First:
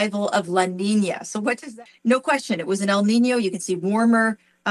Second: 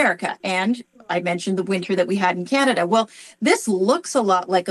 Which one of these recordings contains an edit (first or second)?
first